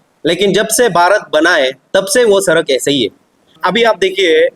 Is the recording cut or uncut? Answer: cut